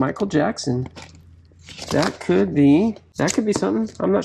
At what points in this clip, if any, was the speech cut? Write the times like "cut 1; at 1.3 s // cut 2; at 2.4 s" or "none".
cut 1; at 3.1 s